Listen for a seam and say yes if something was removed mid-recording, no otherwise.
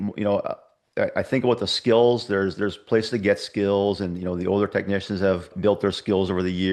yes